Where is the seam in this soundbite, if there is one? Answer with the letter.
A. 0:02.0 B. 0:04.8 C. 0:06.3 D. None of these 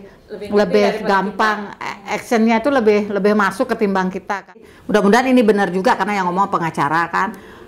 B